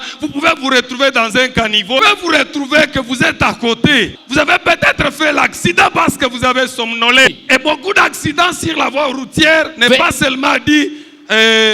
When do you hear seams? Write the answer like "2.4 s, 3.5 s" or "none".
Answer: 2.0 s, 4.1 s, 7.3 s